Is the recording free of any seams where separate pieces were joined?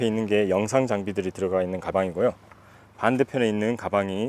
no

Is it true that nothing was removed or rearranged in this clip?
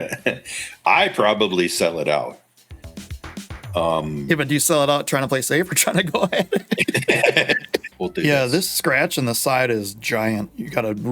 no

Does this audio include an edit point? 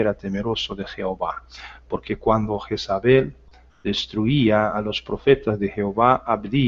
yes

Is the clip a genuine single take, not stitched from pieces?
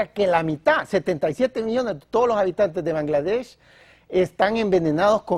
yes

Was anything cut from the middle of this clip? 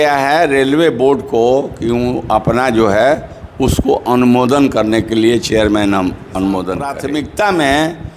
yes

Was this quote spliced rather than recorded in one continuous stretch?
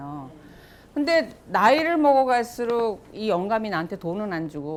no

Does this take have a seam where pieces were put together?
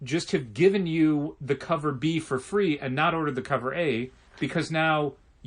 yes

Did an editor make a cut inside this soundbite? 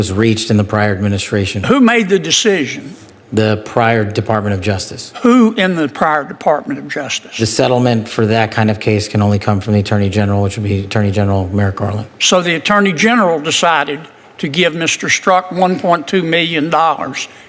no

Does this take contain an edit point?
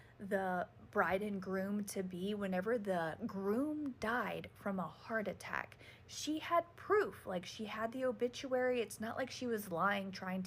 no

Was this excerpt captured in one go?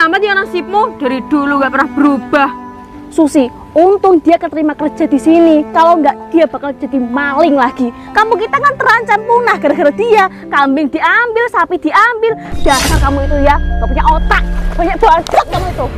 no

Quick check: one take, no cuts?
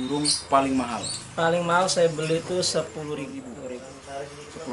no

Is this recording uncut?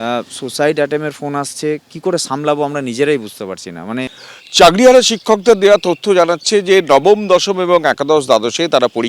no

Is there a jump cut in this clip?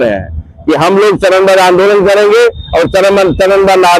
no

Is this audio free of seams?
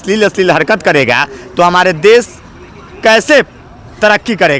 yes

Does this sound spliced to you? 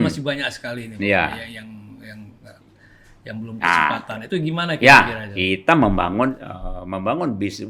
no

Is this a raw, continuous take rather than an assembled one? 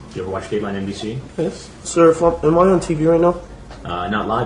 no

